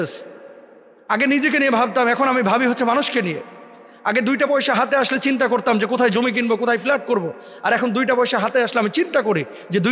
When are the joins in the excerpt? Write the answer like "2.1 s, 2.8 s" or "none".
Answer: none